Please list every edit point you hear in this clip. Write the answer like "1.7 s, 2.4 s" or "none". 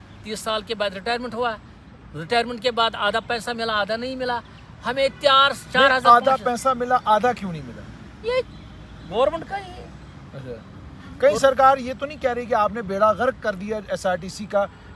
none